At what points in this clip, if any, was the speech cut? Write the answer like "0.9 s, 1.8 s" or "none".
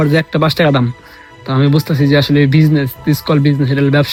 none

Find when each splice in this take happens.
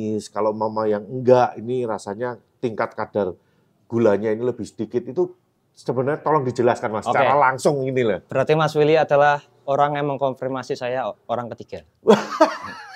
none

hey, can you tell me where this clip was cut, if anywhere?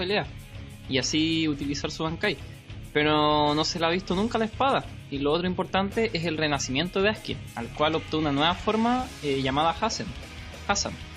0.9 s

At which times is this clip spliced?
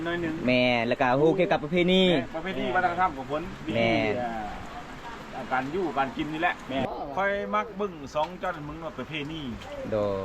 6.8 s

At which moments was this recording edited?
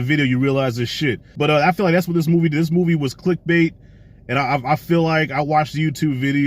1.2 s

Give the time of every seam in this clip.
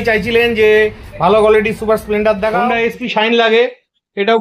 2.6 s

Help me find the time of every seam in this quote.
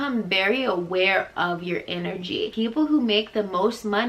2.5 s

